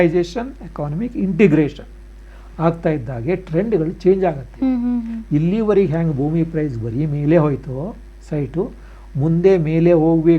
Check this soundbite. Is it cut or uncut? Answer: uncut